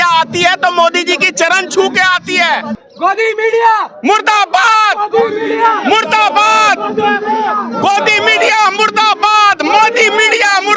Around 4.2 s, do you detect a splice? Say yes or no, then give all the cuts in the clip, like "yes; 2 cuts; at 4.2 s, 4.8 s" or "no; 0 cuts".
no; 1 cut; at 2.8 s